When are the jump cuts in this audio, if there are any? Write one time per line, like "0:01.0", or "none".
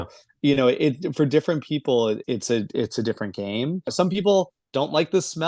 0:02.2
0:03.9